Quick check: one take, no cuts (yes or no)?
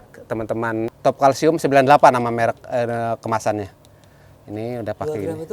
no